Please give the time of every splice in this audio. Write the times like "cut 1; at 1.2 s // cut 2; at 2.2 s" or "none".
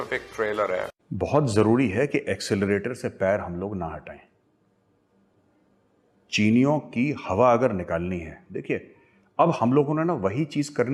none